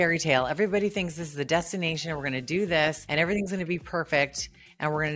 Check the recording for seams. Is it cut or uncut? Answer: cut